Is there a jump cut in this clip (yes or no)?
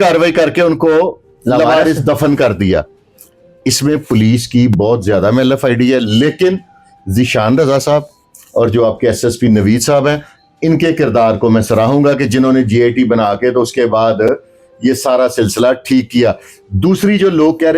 no